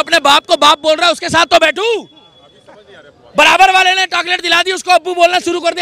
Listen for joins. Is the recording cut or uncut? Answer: uncut